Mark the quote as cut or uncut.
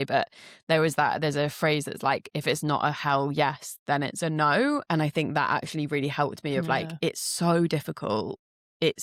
uncut